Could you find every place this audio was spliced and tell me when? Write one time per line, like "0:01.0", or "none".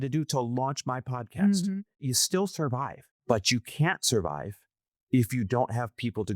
0:02.0
0:03.1